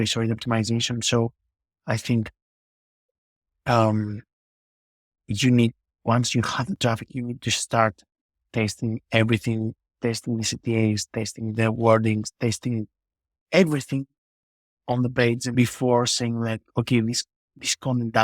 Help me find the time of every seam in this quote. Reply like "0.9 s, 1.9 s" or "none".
15.5 s